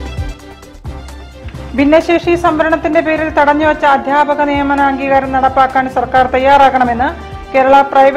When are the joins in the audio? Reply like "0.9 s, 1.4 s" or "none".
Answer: 1.1 s